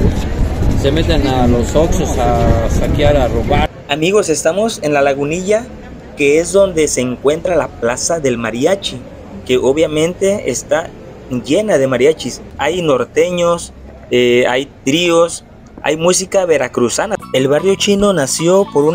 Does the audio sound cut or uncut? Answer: cut